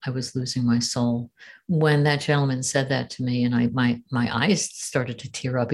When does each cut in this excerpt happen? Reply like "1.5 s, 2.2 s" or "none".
none